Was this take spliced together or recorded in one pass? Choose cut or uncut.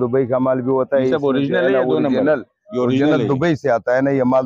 uncut